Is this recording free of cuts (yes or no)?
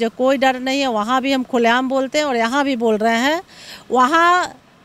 yes